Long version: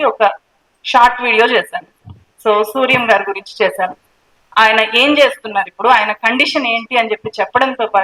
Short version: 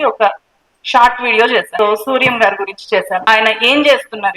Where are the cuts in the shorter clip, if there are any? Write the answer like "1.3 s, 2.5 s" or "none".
1.7 s, 3.3 s